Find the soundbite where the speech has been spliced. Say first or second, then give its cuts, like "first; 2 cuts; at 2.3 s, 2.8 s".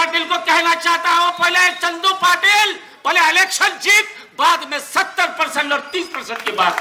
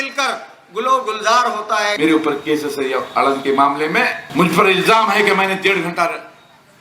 second; 2 cuts; at 1.9 s, 4.2 s